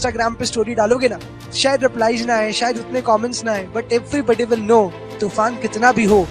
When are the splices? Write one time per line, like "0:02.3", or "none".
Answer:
0:01.3
0:05.2